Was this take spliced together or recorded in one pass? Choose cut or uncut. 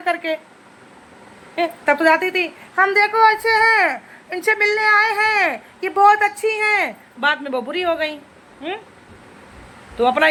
uncut